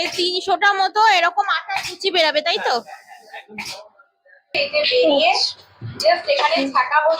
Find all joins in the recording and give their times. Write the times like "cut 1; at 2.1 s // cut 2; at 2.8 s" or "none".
cut 1; at 4.5 s